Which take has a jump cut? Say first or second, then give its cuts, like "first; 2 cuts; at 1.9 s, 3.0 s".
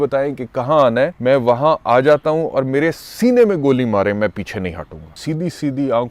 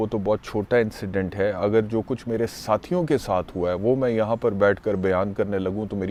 first; 2 cuts; at 1.2 s, 5.1 s